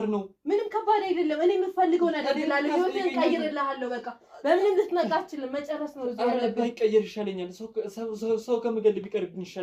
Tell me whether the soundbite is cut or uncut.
uncut